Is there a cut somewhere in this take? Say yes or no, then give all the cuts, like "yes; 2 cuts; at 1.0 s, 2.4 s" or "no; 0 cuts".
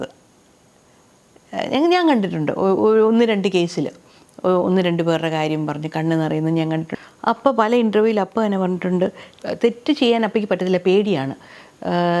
yes; 2 cuts; at 6.9 s, 9.3 s